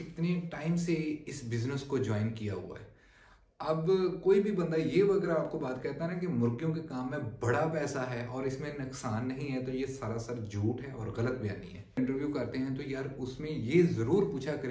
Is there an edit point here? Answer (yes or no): yes